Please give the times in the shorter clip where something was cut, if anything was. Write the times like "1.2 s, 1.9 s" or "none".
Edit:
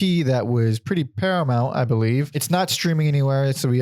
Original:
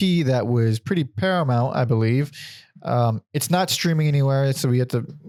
2.4 s